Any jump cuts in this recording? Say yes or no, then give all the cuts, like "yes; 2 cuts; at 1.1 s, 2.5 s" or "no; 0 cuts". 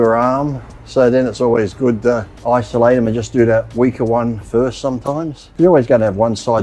yes; 2 cuts; at 2.3 s, 5.4 s